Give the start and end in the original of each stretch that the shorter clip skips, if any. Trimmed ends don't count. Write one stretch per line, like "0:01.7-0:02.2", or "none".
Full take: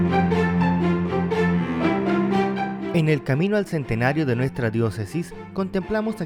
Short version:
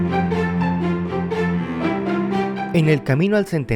0:02.7-0:02.9